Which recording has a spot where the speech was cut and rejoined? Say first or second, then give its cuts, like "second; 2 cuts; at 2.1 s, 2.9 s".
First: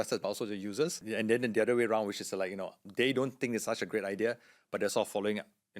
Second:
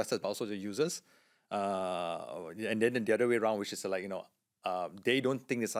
first; 2 cuts; at 1.0 s, 2.8 s